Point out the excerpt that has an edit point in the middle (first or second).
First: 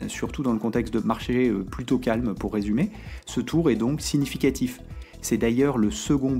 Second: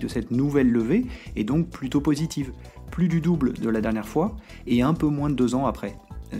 first